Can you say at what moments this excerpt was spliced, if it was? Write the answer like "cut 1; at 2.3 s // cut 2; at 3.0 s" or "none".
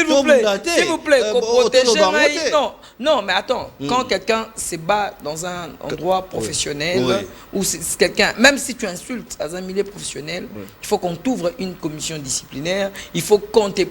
none